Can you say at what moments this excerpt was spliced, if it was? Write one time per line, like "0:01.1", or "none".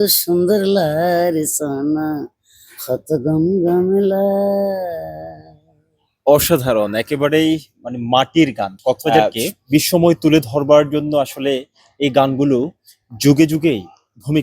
0:09.1